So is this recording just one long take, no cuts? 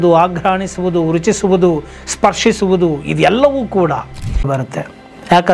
no; 1 cut; at 4.5 s

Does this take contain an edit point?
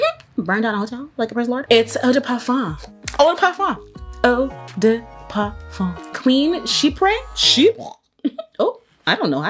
yes; 2 cuts; at 1.6 s, 6.1 s

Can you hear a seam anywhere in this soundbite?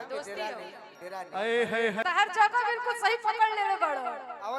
yes; 1 cut; at 2.0 s

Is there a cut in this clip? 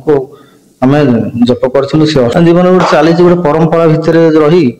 yes; 1 cut; at 2.3 s

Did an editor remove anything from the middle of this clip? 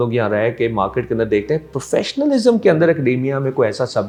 no; 0 cuts

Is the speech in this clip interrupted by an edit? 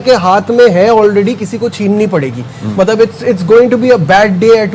no; 0 cuts

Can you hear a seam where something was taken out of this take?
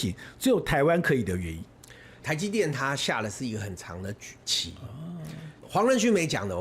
yes; 2 cuts; at 2.1 s, 5.5 s

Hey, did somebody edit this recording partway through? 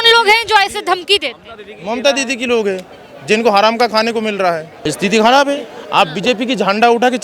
yes; 1 cut; at 4.7 s

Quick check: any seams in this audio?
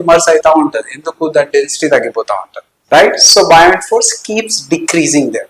no; 0 cuts

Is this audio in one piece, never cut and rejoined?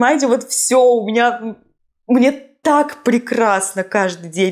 yes; 0 cuts

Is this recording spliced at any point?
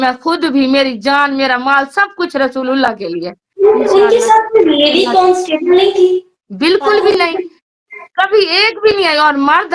yes; 2 cuts; at 3.4 s, 6.4 s

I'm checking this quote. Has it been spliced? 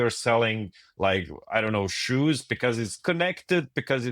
yes; 1 cut; at 3.0 s

